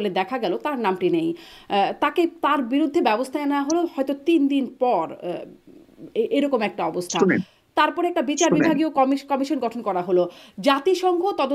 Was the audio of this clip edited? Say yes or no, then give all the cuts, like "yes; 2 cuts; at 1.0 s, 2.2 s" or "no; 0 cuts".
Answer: no; 0 cuts